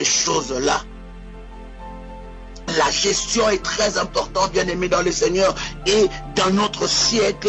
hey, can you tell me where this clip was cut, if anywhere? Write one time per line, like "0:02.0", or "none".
none